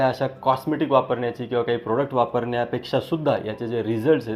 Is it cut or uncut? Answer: uncut